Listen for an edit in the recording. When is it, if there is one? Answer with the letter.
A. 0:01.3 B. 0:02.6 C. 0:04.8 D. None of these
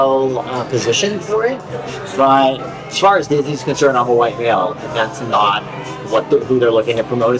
B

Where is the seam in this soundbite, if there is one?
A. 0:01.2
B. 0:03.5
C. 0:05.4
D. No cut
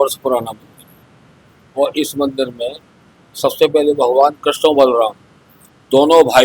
D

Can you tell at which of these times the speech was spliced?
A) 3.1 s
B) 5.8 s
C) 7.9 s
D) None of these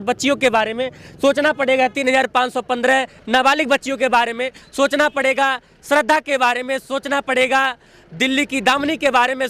D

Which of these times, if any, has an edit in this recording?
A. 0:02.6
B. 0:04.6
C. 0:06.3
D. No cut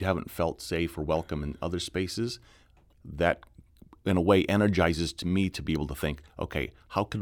D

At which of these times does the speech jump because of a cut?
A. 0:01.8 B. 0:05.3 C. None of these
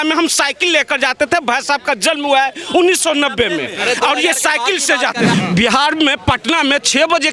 B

